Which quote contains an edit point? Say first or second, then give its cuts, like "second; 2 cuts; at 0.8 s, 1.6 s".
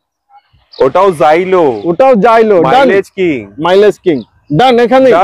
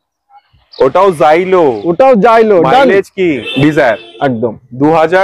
second; 1 cut; at 3.5 s